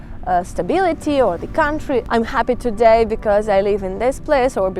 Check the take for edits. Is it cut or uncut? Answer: cut